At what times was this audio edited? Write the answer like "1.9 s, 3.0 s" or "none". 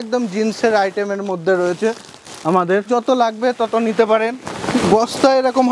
2.9 s, 4.5 s